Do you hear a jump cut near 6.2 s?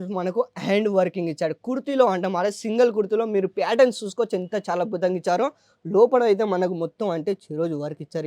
no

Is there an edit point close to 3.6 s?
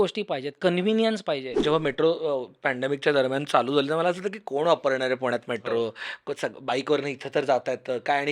no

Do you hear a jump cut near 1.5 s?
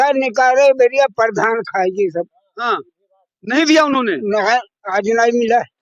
no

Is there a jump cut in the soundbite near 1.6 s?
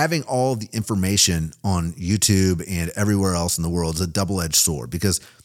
no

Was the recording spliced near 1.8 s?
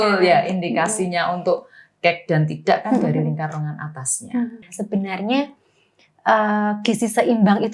no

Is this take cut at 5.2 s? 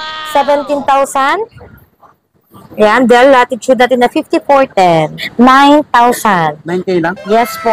yes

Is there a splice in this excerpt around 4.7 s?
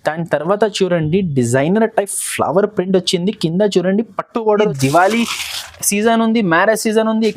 yes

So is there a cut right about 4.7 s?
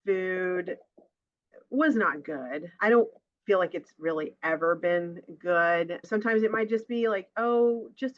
no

